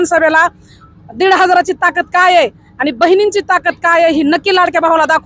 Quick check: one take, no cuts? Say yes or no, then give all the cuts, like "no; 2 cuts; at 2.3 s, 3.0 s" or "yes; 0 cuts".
yes; 0 cuts